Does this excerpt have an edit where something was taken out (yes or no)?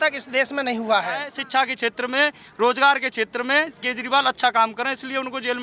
yes